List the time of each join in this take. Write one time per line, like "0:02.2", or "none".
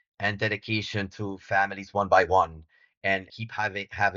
0:03.1